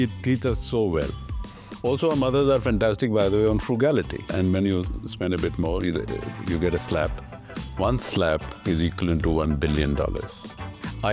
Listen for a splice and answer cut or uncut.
cut